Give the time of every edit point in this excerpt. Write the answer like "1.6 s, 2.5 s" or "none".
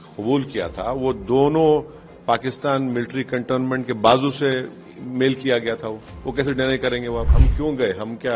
7.3 s